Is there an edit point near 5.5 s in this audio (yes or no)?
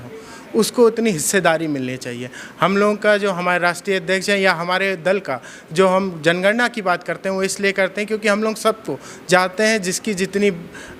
no